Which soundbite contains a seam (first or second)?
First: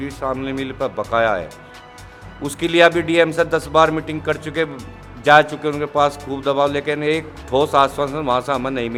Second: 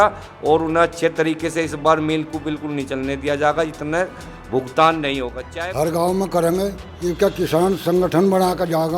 second